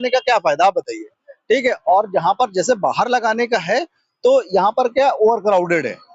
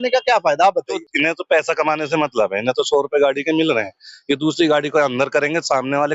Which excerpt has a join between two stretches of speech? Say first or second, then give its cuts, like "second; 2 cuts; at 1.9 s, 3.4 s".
second; 1 cut; at 1.0 s